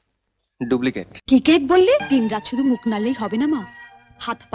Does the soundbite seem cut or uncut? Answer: cut